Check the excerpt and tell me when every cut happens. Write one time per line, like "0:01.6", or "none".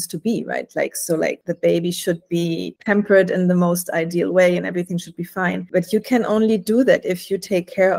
0:01.5
0:02.7